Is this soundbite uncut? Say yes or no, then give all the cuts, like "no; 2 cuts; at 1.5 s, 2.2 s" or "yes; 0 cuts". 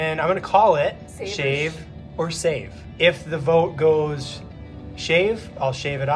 no; 2 cuts; at 1.1 s, 2.8 s